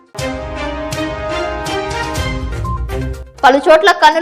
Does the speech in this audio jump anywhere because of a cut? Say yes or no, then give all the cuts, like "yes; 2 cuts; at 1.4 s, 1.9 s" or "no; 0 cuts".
yes; 1 cut; at 3.2 s